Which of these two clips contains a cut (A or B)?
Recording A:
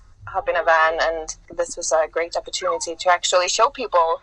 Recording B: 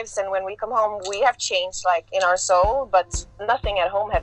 A